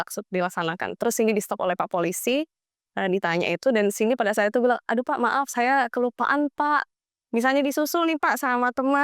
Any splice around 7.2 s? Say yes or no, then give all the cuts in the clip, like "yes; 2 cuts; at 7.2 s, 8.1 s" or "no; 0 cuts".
no; 0 cuts